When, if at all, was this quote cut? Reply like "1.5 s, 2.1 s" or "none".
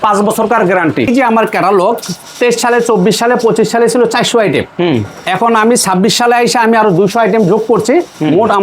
1.1 s